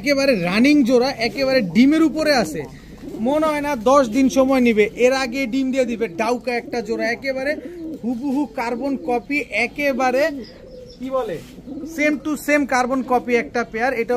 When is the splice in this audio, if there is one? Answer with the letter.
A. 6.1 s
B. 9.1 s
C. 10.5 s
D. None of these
D